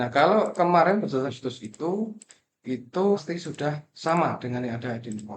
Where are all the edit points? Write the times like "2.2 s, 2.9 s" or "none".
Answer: 1.2 s, 3.2 s